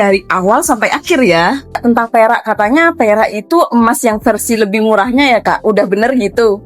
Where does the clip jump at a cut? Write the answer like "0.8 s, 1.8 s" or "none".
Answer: 1.8 s